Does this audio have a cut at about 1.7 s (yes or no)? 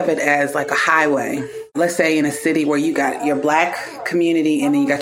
yes